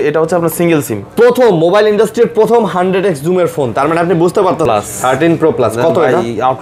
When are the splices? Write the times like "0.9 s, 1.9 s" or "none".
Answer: 1.0 s, 4.7 s

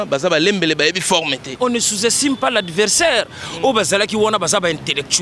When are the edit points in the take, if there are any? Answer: 1.6 s

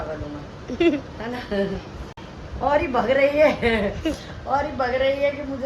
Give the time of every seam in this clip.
none

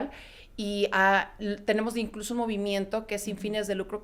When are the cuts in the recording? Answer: none

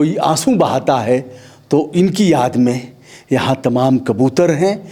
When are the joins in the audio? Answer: none

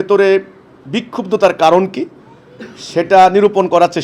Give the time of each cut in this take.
none

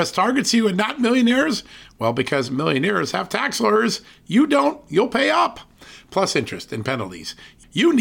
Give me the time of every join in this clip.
none

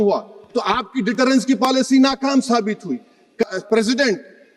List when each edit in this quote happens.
3.4 s

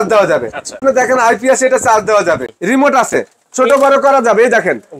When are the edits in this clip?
0.8 s, 2.5 s

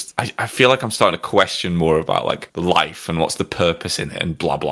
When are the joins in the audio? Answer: none

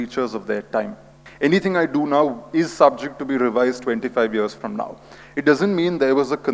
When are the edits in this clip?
1.1 s

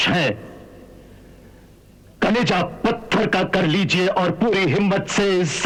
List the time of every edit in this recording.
none

